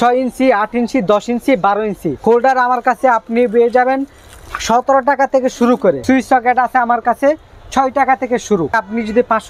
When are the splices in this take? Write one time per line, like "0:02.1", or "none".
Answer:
0:02.1
0:06.0
0:08.8